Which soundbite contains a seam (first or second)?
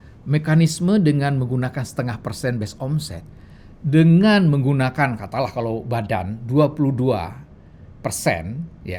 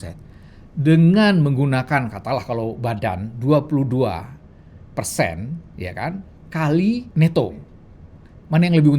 second